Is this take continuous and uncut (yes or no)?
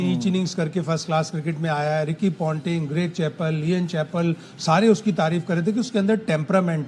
yes